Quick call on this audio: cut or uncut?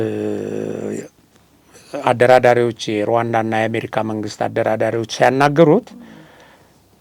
uncut